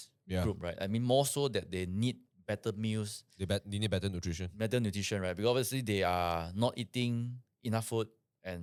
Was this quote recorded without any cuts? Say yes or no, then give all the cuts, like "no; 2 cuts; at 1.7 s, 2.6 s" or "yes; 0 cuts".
yes; 0 cuts